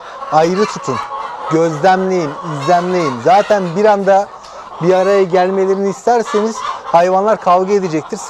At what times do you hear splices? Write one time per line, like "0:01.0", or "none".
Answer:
none